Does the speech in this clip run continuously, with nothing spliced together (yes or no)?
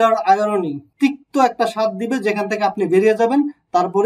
yes